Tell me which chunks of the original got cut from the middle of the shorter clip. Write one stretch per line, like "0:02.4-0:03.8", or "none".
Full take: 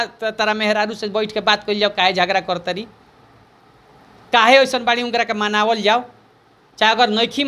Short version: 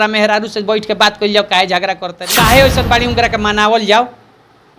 0:02.6-0:04.1